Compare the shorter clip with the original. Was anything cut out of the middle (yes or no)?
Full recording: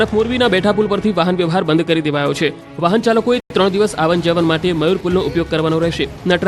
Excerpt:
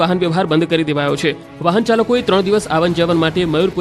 yes